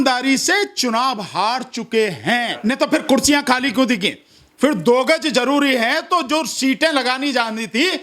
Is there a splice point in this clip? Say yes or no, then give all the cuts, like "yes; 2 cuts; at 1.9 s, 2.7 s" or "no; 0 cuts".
yes; 1 cut; at 2.5 s